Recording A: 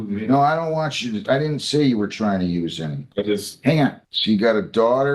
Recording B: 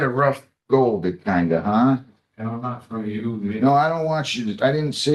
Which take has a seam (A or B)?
A